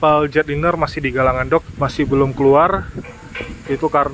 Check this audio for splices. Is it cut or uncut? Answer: cut